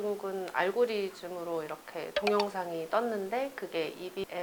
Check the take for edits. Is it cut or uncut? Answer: uncut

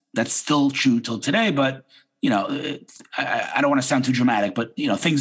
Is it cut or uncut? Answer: uncut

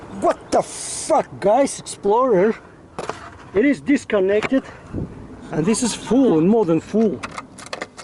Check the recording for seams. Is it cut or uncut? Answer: uncut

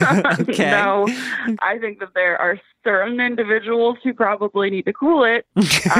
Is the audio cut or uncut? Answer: cut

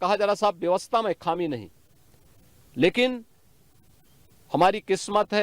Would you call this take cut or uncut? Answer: uncut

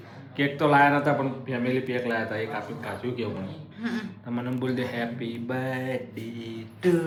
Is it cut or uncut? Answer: uncut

